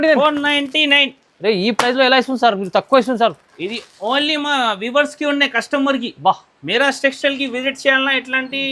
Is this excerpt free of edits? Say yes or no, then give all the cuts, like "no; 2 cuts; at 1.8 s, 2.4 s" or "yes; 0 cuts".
yes; 0 cuts